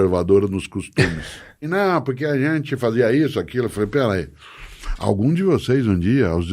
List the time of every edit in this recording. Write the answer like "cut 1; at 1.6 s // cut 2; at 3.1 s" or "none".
cut 1; at 1.6 s